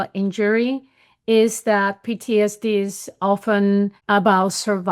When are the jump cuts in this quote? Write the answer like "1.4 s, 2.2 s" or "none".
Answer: 4.0 s